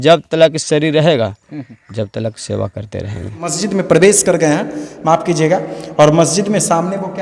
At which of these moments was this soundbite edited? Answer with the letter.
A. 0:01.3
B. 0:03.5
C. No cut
B